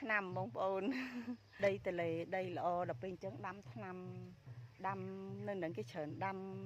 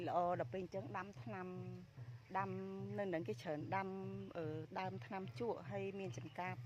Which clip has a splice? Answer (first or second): first